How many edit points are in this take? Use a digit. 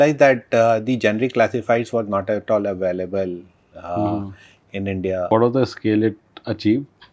1